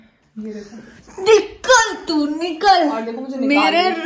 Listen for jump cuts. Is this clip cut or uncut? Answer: uncut